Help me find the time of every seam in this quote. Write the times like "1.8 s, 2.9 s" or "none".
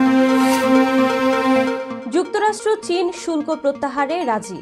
1.9 s